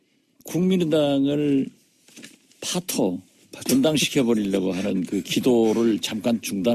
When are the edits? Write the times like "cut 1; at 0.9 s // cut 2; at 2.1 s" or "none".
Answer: cut 1; at 4.2 s